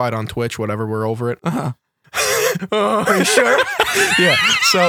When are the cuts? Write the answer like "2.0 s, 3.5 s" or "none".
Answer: 1.4 s